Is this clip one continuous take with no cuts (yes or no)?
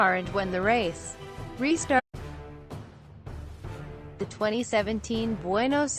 yes